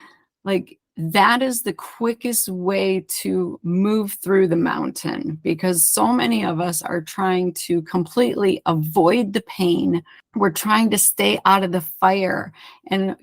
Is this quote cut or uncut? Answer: cut